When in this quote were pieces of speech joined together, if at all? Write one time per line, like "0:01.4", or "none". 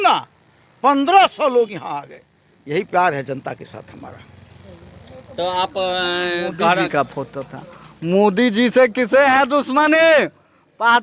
0:06.8